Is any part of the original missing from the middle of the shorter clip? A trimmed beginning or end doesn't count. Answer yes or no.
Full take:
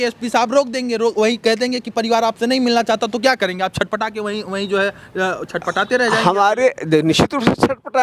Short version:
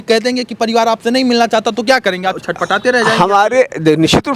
yes